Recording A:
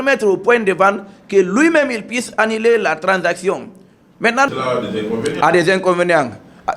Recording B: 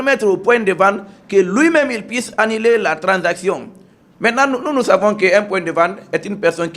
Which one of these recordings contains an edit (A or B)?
A